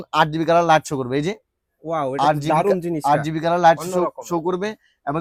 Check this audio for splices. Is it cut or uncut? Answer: uncut